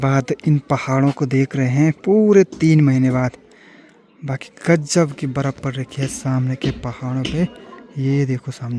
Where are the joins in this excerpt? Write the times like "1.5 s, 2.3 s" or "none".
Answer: none